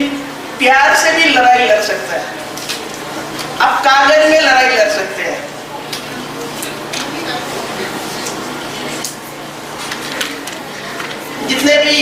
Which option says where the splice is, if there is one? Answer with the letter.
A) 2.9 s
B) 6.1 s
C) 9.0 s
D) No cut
D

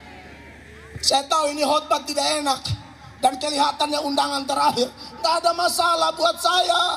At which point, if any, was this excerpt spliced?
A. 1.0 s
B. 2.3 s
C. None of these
A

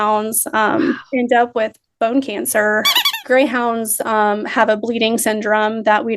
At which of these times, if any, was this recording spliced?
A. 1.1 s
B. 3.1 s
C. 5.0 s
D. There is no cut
B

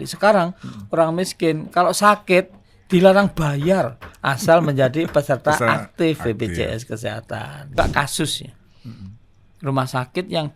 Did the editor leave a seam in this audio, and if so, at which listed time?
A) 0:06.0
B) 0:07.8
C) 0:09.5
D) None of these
B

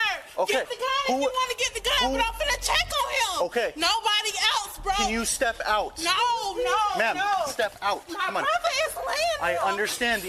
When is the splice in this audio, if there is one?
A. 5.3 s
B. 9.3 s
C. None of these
C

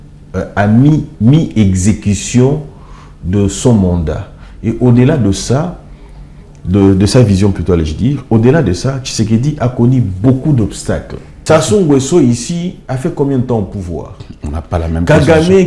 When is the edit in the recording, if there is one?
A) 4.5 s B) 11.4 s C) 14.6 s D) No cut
B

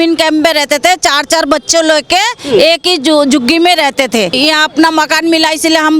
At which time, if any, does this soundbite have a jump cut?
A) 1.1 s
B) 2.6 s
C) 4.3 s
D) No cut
C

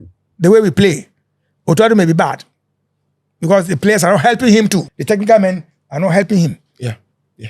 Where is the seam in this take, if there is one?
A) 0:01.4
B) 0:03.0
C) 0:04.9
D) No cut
C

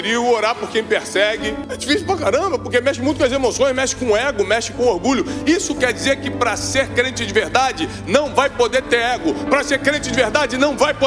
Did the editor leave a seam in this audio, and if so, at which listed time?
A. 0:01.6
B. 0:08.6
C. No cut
A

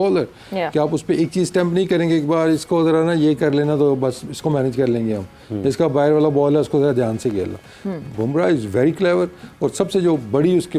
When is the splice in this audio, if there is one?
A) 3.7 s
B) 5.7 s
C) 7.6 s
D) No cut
D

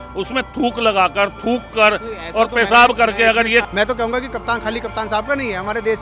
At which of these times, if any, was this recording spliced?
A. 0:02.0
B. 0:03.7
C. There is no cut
B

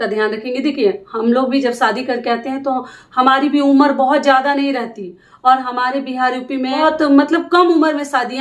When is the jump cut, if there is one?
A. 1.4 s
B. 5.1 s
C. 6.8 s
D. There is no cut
C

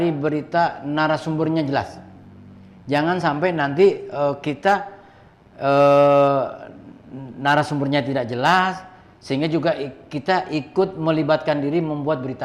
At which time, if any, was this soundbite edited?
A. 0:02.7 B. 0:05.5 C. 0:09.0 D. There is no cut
D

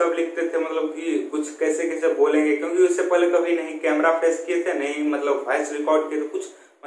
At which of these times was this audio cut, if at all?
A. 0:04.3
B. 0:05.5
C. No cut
C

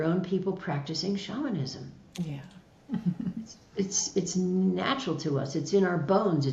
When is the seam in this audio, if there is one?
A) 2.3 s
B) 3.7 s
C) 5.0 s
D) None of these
D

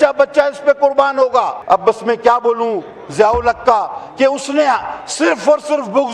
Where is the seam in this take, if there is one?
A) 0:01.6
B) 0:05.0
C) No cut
A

